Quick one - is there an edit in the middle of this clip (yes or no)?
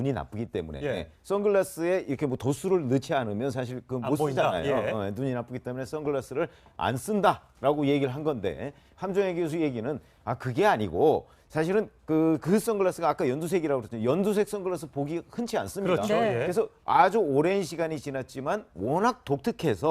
yes